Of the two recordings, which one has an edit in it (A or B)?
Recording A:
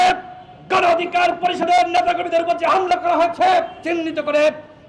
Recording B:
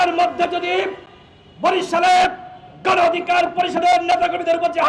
A